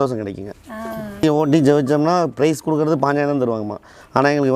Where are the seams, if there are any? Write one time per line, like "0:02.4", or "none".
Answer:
0:01.2